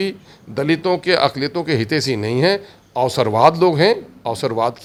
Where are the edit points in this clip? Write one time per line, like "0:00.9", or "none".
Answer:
none